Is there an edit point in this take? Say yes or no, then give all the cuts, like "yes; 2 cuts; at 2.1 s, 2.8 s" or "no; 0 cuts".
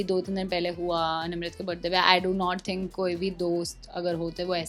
no; 0 cuts